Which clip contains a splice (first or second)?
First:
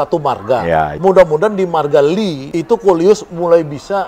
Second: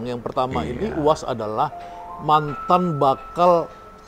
first